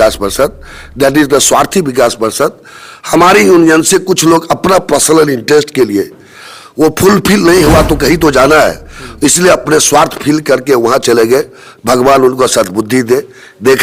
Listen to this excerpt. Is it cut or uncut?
uncut